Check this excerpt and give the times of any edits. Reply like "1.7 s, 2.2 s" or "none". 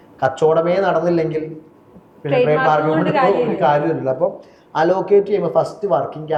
none